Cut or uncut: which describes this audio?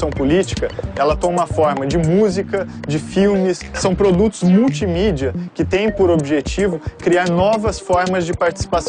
uncut